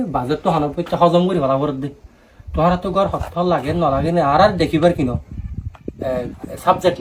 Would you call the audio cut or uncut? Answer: uncut